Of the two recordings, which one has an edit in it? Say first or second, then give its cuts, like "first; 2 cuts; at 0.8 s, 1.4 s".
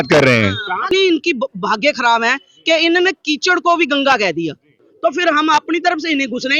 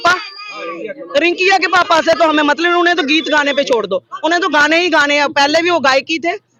first; 2 cuts; at 0.8 s, 4.8 s